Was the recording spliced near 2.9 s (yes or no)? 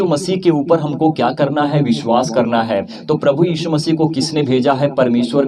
yes